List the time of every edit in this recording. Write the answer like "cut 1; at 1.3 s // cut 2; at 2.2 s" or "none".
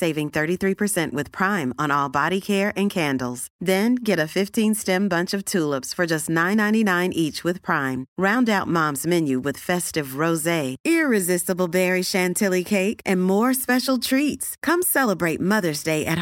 none

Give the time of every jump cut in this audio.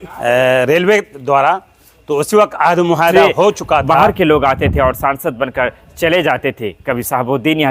cut 1; at 4.0 s

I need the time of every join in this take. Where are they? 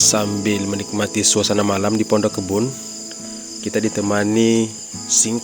none

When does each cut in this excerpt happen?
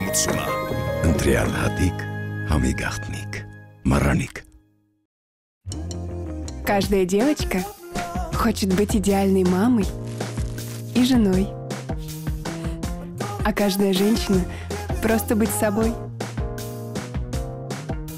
none

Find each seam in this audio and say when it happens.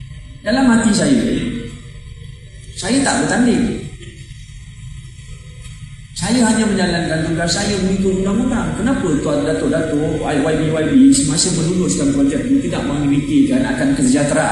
none

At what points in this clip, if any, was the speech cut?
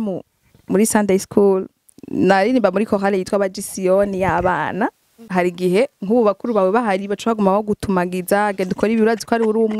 cut 1; at 5.2 s

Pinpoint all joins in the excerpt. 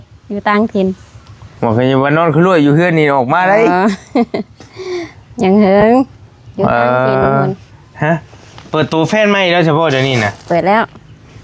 none

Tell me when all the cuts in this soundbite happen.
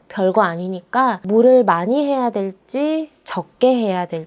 cut 1; at 1.2 s

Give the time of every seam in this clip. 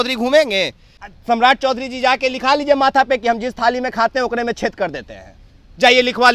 cut 1; at 1.0 s

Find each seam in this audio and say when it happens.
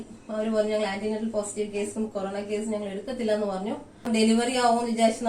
cut 1; at 4.1 s

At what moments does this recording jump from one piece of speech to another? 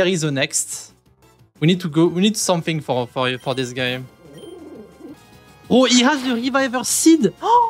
cut 1; at 5.1 s

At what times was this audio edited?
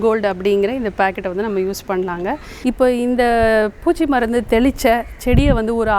cut 1; at 2.5 s

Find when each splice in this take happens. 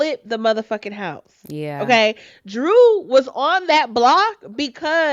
none

